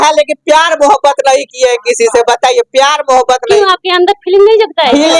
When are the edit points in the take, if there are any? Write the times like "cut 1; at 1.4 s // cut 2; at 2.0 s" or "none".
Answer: none